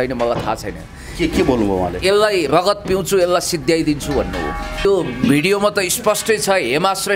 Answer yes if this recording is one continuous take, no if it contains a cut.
no